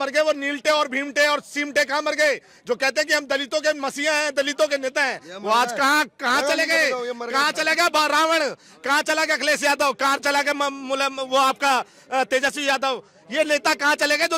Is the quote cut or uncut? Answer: uncut